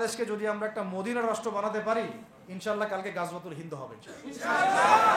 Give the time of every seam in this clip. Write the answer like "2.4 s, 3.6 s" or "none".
none

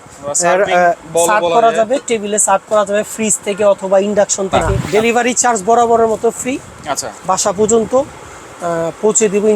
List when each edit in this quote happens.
4.7 s

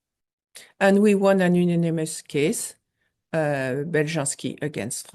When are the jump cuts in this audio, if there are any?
none

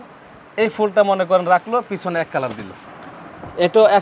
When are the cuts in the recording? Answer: 2.8 s

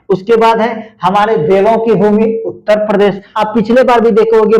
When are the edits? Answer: 3.3 s

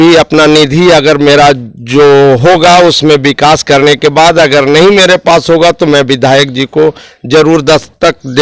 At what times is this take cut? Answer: none

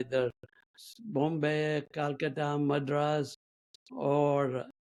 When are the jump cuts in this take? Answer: none

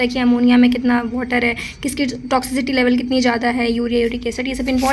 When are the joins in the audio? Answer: none

